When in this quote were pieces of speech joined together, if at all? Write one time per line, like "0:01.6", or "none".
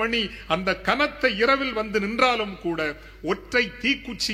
none